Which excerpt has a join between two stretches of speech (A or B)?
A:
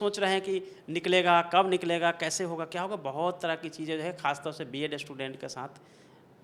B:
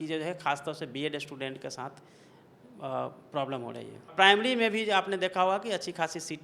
B